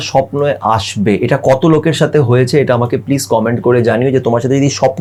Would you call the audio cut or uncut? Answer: uncut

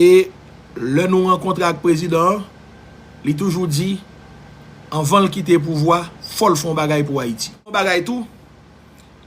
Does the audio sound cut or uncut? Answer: cut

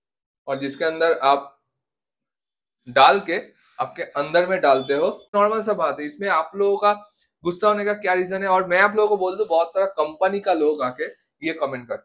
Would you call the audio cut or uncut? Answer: cut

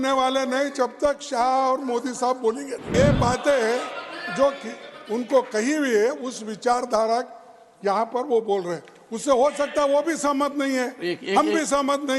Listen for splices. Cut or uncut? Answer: cut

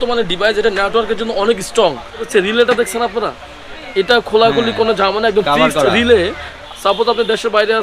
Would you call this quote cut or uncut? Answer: cut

